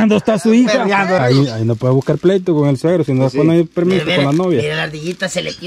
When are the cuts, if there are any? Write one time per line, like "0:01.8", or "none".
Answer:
0:01.2